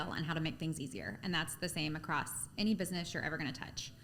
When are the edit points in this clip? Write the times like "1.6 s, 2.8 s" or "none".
none